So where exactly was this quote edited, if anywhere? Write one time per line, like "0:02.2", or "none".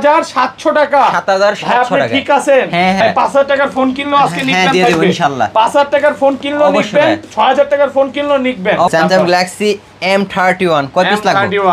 0:03.0
0:08.9